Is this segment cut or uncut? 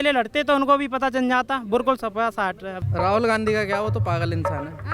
cut